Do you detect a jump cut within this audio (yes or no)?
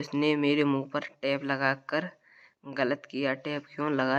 no